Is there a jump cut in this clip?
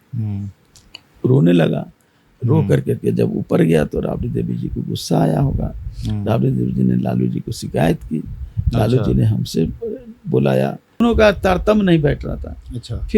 yes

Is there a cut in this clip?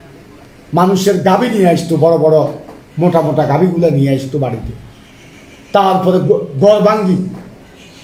no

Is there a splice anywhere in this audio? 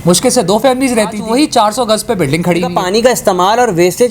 yes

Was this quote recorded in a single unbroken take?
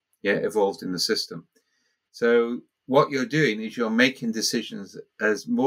yes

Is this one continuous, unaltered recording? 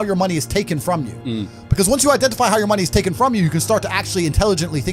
yes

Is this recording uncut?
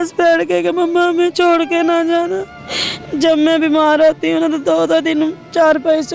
yes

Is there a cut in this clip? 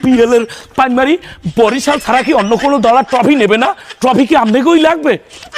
no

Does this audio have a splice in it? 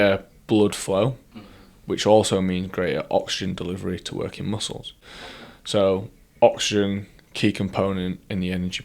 no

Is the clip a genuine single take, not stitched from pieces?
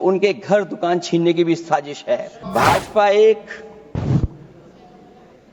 no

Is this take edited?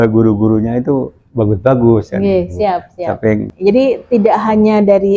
yes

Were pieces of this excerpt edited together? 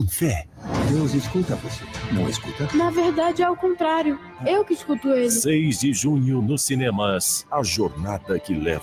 no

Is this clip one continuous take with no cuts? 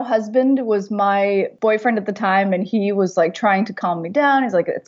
no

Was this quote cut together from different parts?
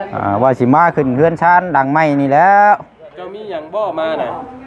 no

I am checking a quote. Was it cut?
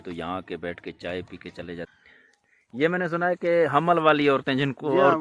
yes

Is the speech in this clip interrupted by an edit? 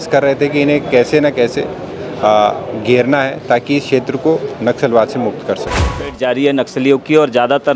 yes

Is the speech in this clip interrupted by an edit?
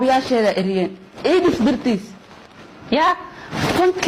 no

